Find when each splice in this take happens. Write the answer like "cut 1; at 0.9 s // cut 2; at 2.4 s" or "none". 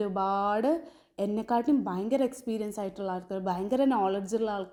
none